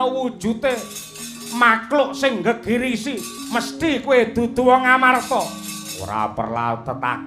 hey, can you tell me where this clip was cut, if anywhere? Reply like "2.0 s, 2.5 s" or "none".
3.3 s